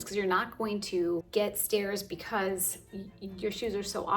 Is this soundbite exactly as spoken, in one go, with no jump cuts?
no; 1 cut; at 1.3 s

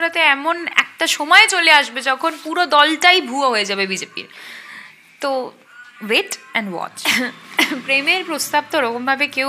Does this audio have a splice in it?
yes; 1 cut; at 7.0 s

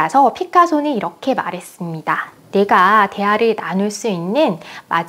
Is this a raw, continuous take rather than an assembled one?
yes; 0 cuts

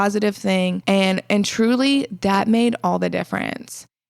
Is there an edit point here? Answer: no; 0 cuts

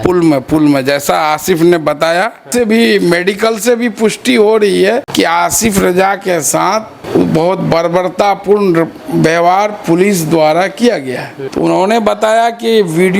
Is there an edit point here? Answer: yes; 4 cuts; at 2.4 s, 5.1 s, 7.0 s, 11.3 s

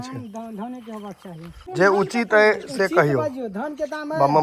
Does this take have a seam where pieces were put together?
yes; 1 cut; at 1.6 s

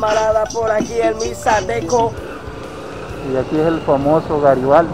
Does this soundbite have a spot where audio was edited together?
yes; 1 cut; at 2.1 s

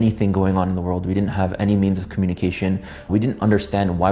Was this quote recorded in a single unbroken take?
yes; 0 cuts

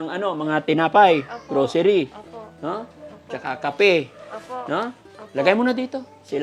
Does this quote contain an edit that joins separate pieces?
no; 0 cuts

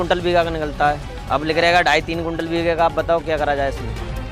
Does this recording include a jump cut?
no; 0 cuts

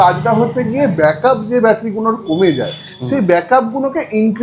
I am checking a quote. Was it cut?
no; 0 cuts

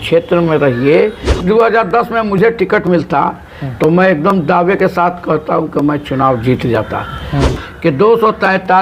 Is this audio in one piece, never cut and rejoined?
no; 2 cuts; at 1.3 s, 7.5 s

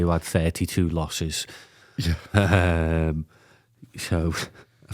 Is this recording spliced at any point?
no; 0 cuts

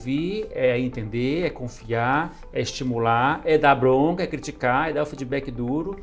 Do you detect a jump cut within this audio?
no; 0 cuts

